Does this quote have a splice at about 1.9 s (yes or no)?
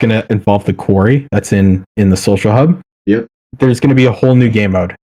no